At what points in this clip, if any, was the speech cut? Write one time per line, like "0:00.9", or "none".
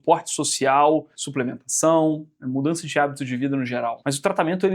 0:01.2
0:04.0